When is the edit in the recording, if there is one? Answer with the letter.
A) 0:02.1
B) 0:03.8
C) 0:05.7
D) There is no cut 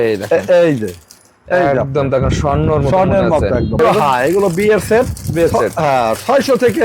B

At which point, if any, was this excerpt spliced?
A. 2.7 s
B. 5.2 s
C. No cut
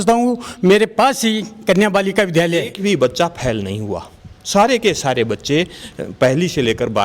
A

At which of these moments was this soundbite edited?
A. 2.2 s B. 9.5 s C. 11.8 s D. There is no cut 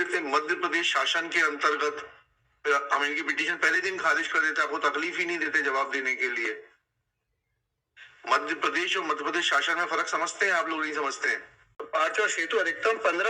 C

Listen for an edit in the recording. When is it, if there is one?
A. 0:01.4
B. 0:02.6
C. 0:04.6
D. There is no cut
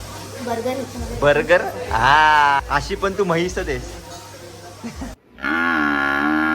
B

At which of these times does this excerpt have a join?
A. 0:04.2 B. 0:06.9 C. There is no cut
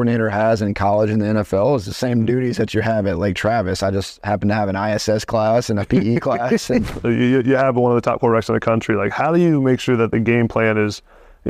B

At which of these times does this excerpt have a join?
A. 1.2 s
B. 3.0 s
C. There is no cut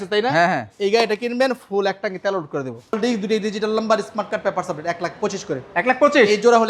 B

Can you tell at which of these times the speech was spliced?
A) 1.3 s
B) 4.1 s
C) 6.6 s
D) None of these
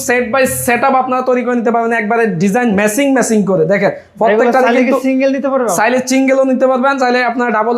D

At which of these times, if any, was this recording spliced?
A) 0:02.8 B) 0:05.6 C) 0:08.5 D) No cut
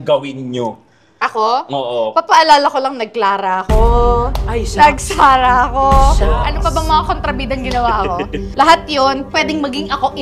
C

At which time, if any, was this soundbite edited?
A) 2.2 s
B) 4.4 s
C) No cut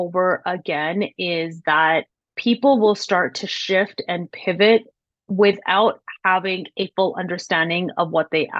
A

